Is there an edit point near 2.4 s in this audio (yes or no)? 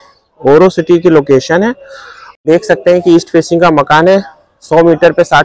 yes